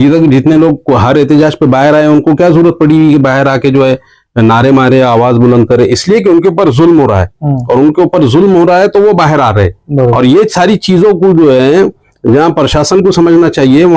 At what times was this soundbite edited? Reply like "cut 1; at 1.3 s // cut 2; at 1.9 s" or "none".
none